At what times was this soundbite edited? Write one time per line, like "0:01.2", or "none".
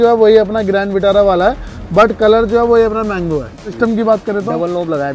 0:03.8